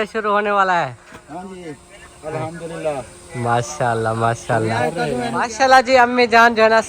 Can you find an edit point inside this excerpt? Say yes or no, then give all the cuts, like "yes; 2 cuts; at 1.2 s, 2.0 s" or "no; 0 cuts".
yes; 1 cut; at 5.3 s